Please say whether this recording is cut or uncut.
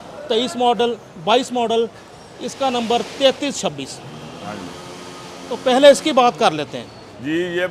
uncut